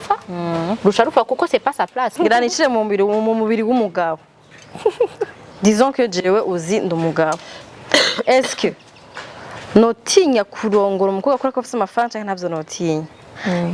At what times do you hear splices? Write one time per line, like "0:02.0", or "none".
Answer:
0:02.1